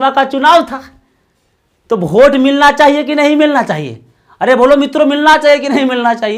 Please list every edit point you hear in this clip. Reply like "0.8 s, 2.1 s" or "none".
none